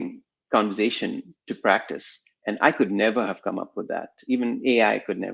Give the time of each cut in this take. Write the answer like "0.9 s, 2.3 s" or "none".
none